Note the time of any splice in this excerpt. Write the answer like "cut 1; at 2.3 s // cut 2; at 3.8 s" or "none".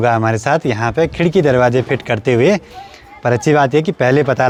none